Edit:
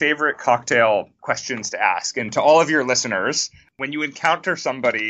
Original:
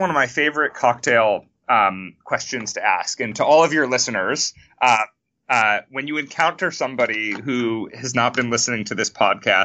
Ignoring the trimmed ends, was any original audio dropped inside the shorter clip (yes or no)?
yes